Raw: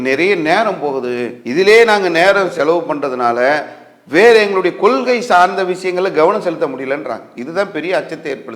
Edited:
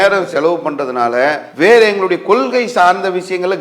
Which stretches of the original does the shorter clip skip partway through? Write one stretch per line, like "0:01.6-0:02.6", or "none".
0:03.7-0:04.0